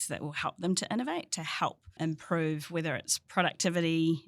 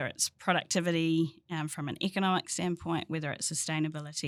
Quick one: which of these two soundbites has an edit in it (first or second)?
first